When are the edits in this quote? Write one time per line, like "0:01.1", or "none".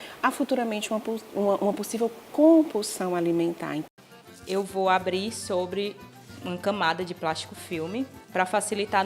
0:03.8